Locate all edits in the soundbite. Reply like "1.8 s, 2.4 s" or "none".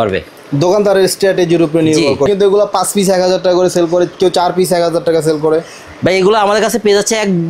2.3 s